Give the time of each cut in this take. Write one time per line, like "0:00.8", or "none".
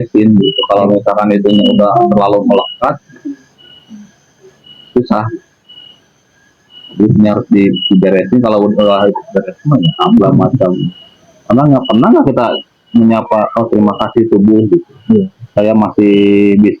0:10.2